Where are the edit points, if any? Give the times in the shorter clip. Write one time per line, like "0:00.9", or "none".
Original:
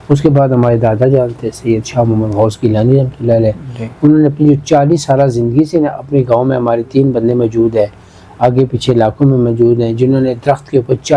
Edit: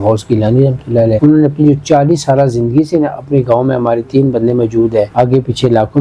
0:01.2
0:05.1